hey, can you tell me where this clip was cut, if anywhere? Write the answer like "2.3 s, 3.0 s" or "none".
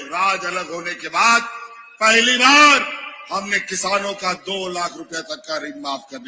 none